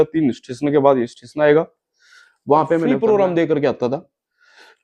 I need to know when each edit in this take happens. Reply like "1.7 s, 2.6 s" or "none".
2.9 s